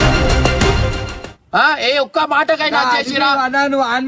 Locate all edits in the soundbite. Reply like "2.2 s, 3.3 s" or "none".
none